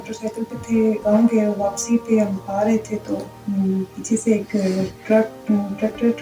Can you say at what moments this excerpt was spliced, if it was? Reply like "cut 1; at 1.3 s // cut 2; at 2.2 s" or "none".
cut 1; at 1.0 s // cut 2; at 3.3 s // cut 3; at 5.0 s